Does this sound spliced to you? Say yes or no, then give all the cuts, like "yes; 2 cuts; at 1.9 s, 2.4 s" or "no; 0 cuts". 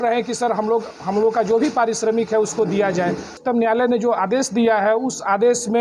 yes; 1 cut; at 3.3 s